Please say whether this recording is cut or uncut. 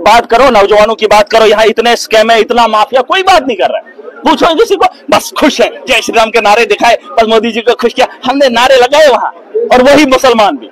uncut